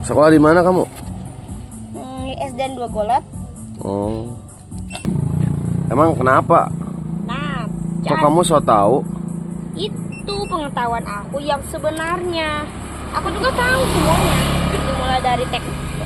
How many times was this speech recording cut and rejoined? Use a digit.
1